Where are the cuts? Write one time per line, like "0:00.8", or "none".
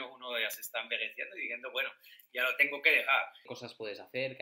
0:03.4